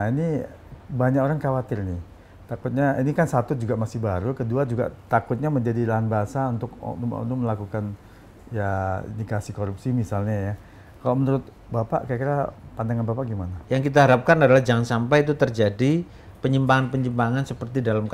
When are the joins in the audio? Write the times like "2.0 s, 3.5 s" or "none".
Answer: 13.5 s